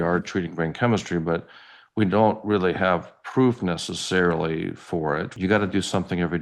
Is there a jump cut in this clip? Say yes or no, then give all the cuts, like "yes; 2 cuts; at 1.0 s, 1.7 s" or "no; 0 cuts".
yes; 1 cut; at 5.3 s